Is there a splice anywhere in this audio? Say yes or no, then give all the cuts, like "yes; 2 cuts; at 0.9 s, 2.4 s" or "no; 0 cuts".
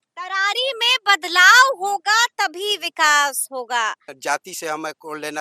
yes; 1 cut; at 4.1 s